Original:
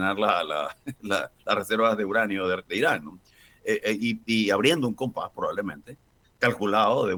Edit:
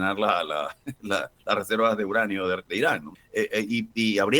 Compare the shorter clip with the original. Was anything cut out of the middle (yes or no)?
yes